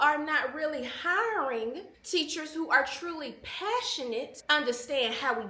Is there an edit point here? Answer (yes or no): yes